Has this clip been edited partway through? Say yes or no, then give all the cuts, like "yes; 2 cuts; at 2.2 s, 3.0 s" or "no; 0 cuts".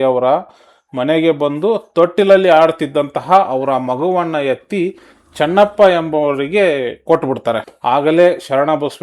yes; 1 cut; at 7.7 s